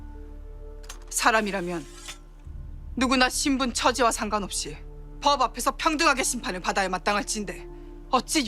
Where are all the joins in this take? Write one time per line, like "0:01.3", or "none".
0:00.9

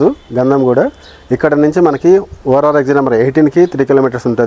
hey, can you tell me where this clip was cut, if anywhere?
none

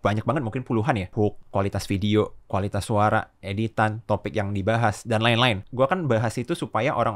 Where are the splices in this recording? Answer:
0:01.1
0:05.6

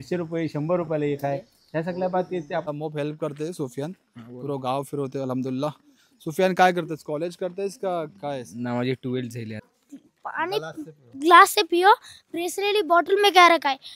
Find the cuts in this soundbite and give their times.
0:02.7
0:09.7

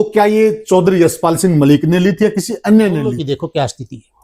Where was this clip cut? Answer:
none

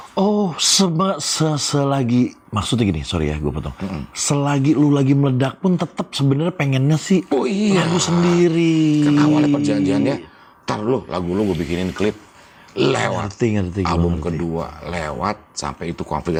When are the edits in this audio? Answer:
none

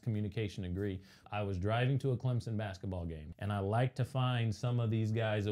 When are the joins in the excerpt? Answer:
0:01.2
0:03.3

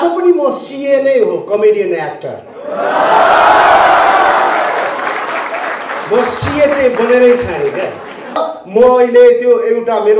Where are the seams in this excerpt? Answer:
0:08.4

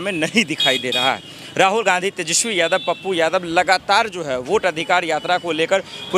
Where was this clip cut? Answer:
none

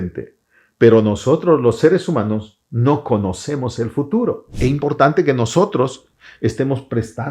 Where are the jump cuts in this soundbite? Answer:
0:04.5

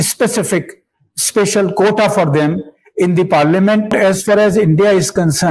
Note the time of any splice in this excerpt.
0:03.9

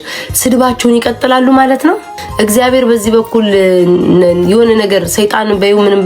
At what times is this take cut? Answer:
0:02.2

